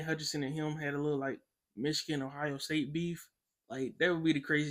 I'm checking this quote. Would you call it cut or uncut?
uncut